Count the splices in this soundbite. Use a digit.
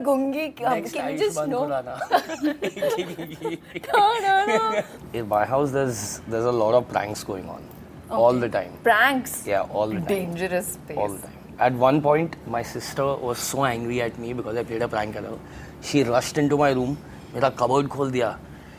1